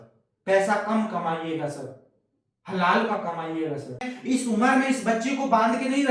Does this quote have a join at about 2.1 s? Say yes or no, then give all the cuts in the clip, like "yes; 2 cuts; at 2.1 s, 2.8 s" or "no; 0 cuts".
no; 1 cut; at 4.1 s